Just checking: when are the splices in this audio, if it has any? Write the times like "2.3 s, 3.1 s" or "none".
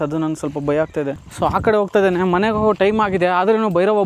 1.3 s